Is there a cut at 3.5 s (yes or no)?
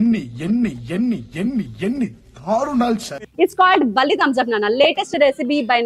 no